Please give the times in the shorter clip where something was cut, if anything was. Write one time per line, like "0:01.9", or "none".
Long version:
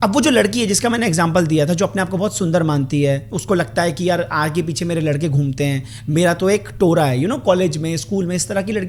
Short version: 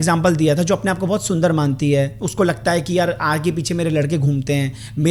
none